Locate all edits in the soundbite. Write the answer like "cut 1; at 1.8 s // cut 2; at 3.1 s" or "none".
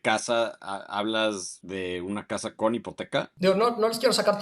cut 1; at 1.6 s // cut 2; at 3.3 s